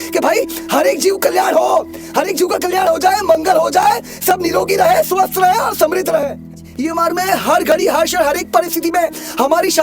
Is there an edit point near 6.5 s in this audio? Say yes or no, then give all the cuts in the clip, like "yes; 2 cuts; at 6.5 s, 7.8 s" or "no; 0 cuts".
yes; 1 cut; at 6.5 s